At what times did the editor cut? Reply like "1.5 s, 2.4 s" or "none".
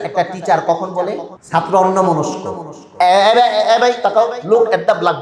1.3 s